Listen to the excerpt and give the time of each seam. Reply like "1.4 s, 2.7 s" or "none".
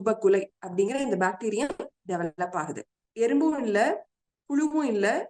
3.0 s

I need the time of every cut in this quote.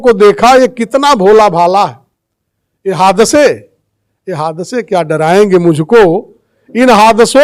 none

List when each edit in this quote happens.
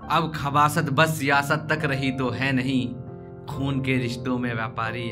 none

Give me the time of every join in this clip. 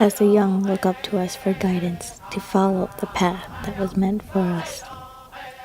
4.6 s

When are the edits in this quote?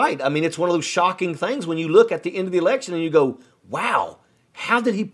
none

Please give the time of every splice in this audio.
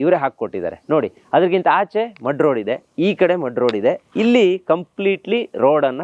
none

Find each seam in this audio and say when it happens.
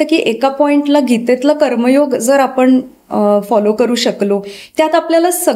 none

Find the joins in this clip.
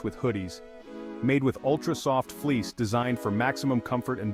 none

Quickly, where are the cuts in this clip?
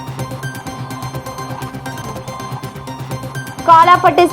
0.7 s, 2.2 s

